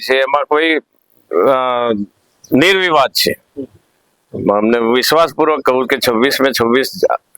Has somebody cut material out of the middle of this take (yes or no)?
no